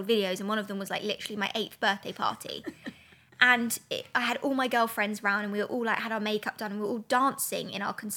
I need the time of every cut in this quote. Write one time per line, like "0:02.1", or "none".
none